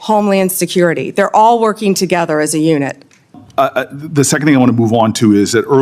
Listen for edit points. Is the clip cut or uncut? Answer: cut